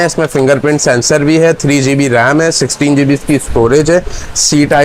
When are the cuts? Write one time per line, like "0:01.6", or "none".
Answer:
none